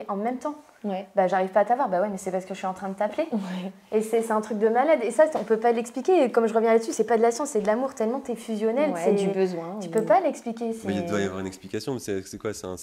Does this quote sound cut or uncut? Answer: uncut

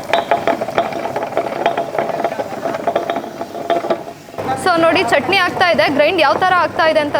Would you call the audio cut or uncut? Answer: uncut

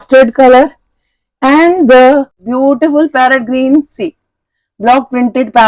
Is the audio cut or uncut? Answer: cut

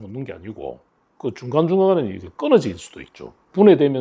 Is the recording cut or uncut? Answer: uncut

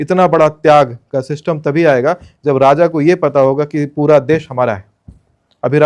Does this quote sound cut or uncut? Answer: uncut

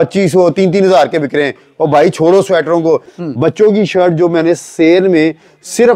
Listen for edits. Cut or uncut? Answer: cut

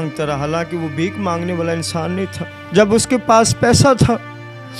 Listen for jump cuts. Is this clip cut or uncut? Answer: cut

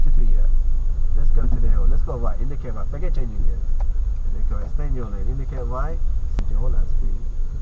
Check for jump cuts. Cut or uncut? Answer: cut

